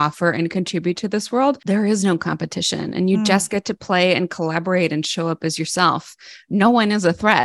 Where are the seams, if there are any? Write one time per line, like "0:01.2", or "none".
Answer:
0:01.6